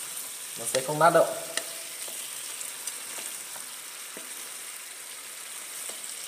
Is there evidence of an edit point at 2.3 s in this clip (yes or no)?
no